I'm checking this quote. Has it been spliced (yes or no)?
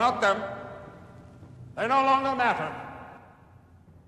no